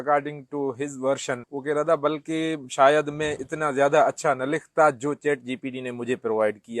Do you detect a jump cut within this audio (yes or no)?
yes